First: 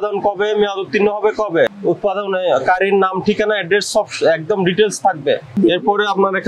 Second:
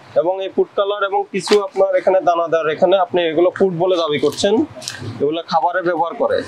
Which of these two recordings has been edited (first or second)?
first